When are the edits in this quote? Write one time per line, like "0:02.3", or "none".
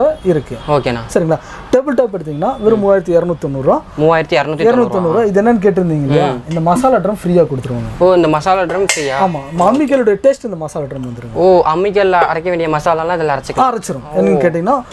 none